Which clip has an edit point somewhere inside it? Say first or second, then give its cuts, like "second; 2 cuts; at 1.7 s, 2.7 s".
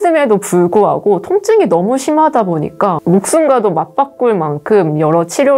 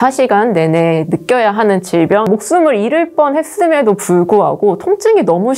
second; 1 cut; at 2.2 s